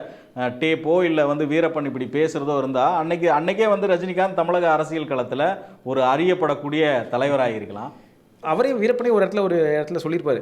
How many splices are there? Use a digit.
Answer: 1